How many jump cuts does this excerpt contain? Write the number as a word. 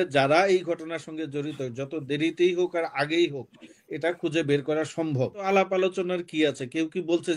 one